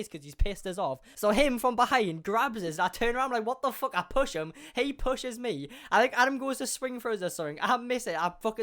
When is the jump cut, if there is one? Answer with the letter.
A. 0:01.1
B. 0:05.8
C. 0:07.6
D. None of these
A